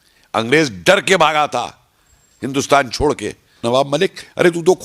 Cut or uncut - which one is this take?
cut